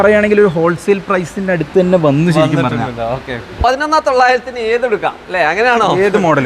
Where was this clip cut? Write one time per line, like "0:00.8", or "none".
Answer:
0:03.6